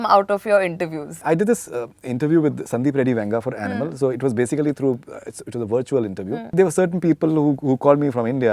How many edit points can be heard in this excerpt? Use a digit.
2